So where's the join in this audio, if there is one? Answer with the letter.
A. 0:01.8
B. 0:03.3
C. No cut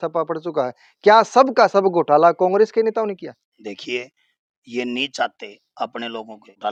C